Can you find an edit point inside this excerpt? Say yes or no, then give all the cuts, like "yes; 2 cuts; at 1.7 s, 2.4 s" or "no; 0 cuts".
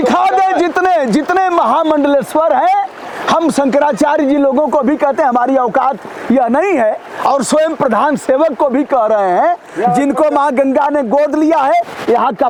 no; 0 cuts